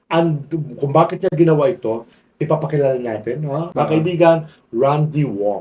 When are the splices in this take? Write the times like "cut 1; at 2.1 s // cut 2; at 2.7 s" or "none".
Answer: cut 1; at 3.6 s